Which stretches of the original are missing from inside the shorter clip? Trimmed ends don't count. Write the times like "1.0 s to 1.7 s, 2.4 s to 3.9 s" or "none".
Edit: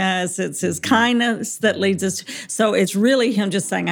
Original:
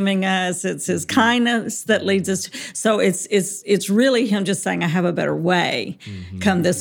3.2 s to 3.9 s